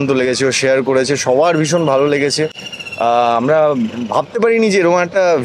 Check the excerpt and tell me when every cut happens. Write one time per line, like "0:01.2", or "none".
none